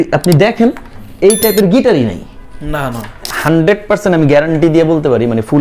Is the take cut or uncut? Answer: cut